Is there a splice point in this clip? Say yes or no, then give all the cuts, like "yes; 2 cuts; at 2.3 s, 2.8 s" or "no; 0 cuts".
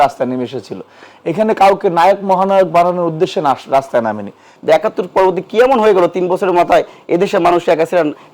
yes; 1 cut; at 4.5 s